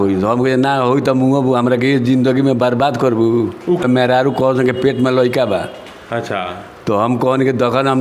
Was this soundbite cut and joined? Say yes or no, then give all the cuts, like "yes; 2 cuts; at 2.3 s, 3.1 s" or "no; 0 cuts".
yes; 1 cut; at 3.8 s